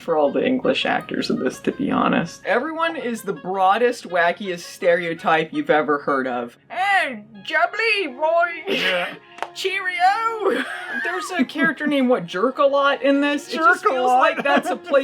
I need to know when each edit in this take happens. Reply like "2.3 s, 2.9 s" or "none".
2.3 s, 6.5 s, 10.9 s